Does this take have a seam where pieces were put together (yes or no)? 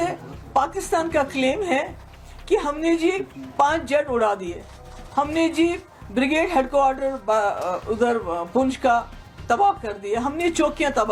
no